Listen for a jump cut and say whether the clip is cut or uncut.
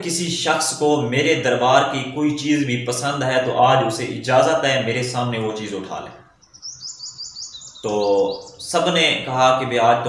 uncut